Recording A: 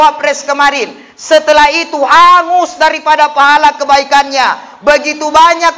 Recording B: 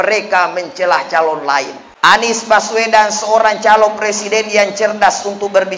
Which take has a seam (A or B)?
B